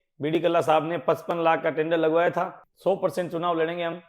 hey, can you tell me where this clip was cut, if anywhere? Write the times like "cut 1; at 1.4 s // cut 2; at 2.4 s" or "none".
cut 1; at 2.6 s